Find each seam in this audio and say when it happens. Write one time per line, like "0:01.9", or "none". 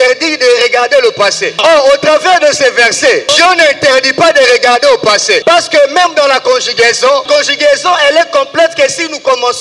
0:01.6
0:03.3
0:05.4
0:07.2